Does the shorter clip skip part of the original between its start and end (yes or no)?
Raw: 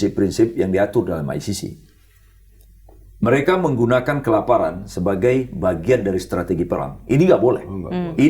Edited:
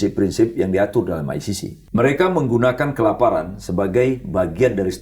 yes